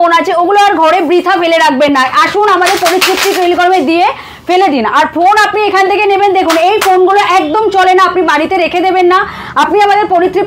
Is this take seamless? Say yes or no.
yes